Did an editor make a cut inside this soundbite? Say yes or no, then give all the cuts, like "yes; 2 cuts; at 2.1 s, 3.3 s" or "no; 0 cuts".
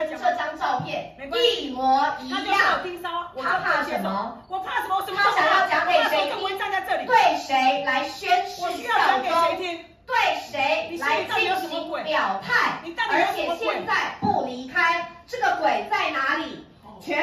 no; 0 cuts